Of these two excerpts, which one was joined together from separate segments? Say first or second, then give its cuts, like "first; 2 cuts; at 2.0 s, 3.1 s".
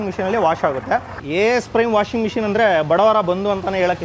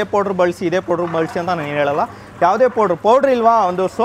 first; 1 cut; at 1.2 s